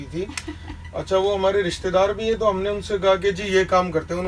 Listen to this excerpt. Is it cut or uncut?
uncut